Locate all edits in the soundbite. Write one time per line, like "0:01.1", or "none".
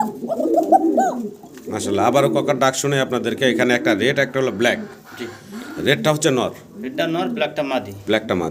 none

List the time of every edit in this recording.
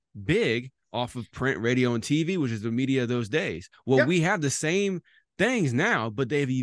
none

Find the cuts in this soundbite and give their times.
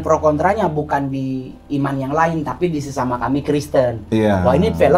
none

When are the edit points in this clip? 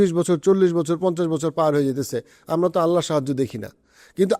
none

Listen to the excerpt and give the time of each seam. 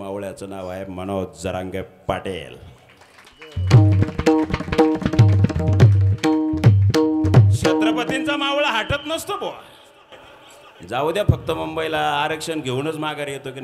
none

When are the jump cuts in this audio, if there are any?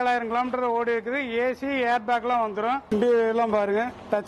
none

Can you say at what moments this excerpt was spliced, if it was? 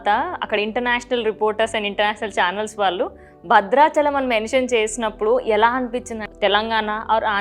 0:06.2

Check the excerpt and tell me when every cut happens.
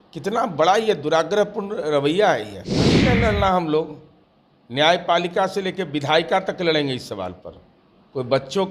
0:03.0

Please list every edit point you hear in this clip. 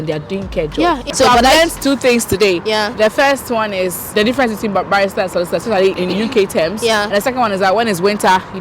0:01.1

